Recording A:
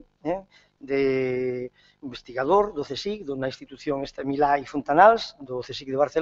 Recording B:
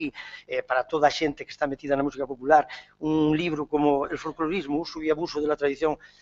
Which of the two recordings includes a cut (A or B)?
A